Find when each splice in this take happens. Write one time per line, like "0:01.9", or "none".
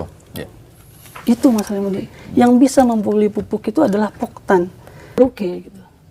0:05.2